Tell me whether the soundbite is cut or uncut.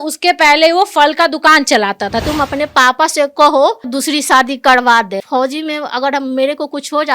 cut